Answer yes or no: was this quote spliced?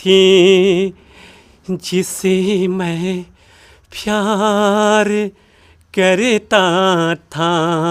no